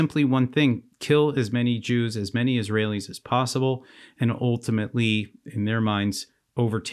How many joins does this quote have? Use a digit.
0